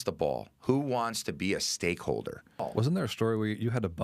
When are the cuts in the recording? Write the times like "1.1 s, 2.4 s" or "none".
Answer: 2.7 s